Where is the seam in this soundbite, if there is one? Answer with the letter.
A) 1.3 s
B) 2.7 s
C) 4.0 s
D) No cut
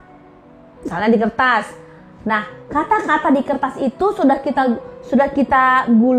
D